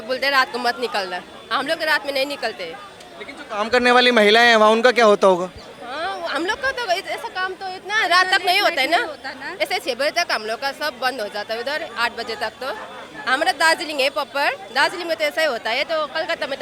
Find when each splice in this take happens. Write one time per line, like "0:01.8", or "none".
none

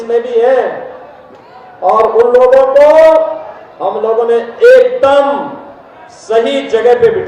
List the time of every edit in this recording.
none

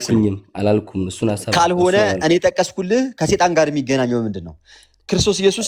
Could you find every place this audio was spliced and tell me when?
none

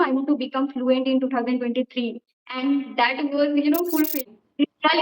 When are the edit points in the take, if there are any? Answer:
0:04.1

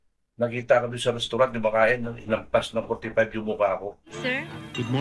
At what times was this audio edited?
0:04.1

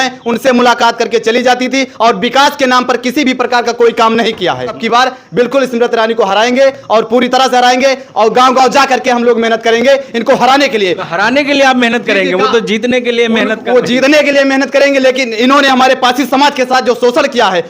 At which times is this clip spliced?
0:04.8

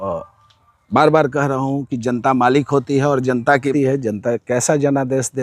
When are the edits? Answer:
0:03.7

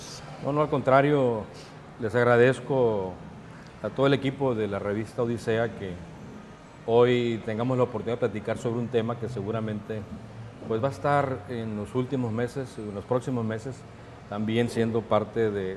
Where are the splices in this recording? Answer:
none

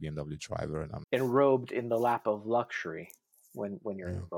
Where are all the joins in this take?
0:01.0

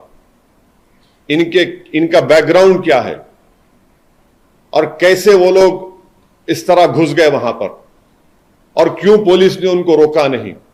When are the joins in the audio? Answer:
none

